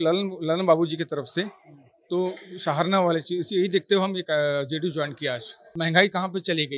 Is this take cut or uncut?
cut